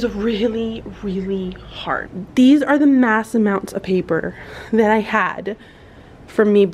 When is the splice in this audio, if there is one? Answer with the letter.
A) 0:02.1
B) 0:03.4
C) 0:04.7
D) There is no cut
A